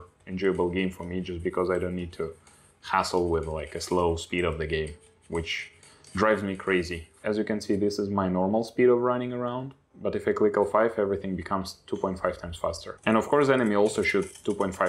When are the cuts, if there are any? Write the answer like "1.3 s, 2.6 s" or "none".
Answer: 7.0 s, 12.9 s